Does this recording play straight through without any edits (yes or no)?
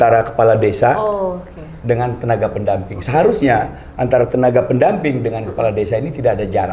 yes